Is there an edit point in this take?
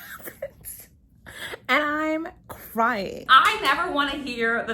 yes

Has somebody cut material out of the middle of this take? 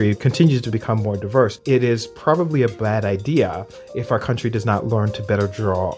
no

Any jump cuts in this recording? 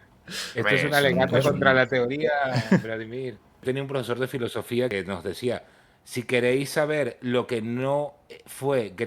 yes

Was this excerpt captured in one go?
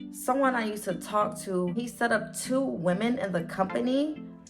no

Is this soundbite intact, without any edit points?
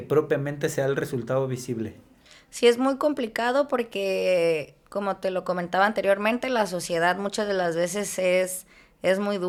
yes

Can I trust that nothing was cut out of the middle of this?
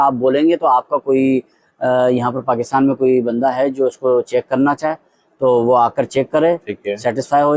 yes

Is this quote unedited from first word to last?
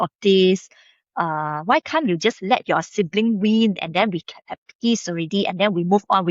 yes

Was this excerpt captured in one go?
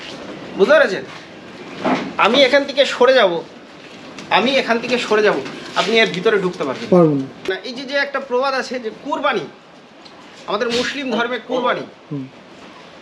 no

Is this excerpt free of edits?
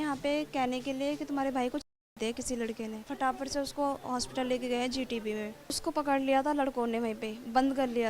no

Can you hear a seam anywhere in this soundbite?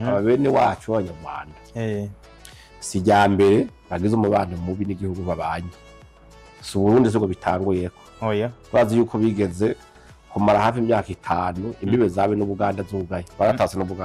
no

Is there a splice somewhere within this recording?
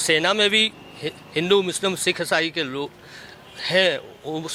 no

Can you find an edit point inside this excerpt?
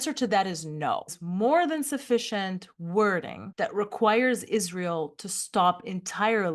yes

